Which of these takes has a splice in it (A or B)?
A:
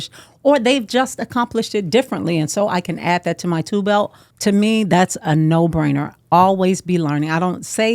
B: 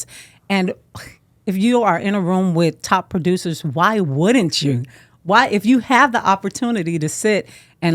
A